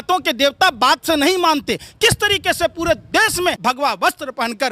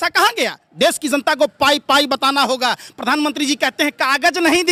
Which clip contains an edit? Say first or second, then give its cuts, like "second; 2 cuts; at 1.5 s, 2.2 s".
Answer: first; 1 cut; at 3.6 s